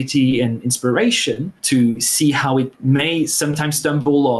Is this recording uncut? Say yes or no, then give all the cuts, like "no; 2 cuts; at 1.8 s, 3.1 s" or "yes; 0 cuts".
yes; 0 cuts